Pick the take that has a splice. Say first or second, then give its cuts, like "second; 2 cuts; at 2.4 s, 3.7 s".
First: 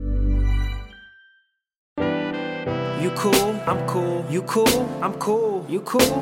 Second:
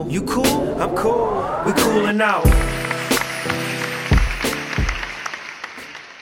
first; 1 cut; at 1.9 s